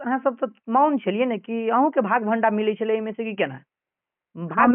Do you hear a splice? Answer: no; 0 cuts

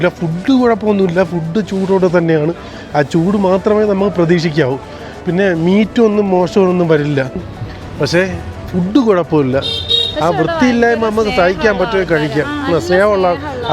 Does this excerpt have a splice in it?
yes; 1 cut; at 7.6 s

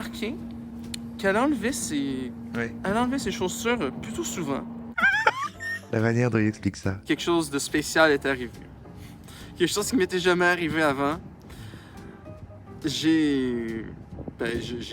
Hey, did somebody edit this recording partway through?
yes; 3 cuts; at 2.8 s, 5.3 s, 7.0 s

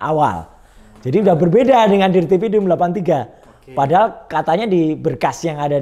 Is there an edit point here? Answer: no; 0 cuts

